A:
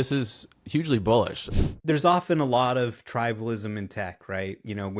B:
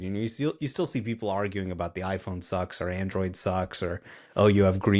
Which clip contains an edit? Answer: A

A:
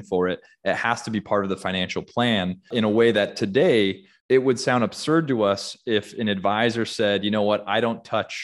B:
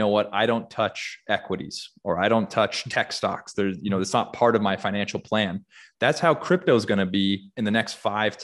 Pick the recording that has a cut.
A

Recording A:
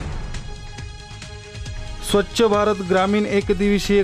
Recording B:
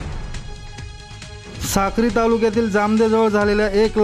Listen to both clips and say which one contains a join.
B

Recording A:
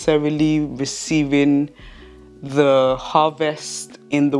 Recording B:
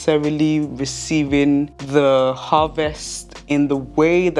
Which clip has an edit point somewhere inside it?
B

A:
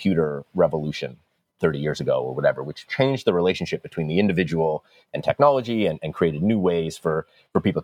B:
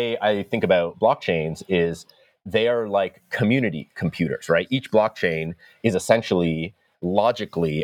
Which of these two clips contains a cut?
A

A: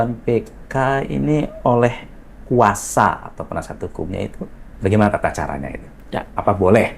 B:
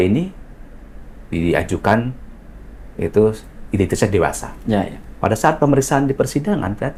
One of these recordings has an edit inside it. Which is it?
A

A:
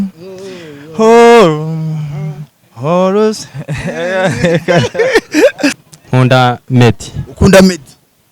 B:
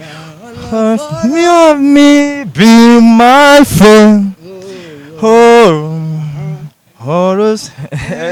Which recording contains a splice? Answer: A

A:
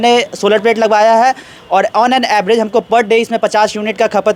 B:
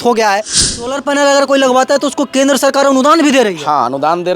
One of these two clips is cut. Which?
B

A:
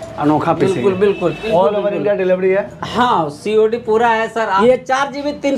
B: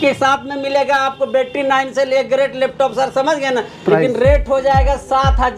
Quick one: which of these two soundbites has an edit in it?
A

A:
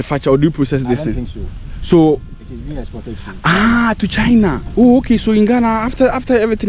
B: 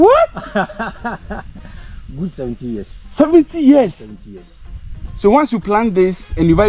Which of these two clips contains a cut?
A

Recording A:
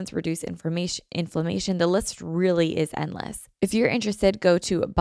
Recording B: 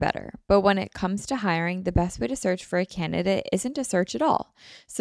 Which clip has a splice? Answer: A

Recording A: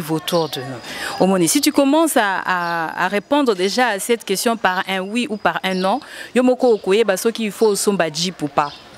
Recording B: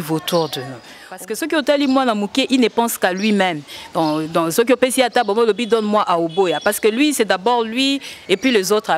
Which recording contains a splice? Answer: B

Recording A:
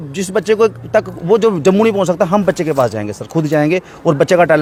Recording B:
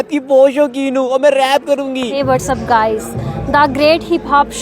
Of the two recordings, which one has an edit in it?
B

